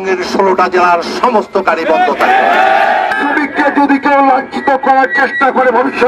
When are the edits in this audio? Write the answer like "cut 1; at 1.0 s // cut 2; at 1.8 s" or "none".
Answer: cut 1; at 3.1 s